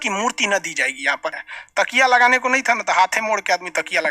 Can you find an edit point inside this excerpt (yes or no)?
yes